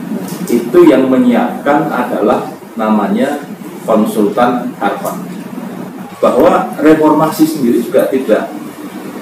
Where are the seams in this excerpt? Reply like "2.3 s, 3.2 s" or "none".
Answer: 6.1 s